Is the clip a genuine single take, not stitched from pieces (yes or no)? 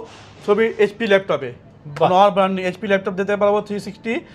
yes